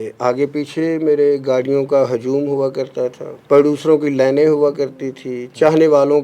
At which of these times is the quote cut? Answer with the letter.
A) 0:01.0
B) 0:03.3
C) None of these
B